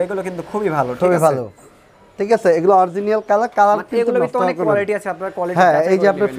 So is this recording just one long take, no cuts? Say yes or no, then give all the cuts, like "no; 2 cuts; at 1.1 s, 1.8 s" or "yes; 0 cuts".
yes; 0 cuts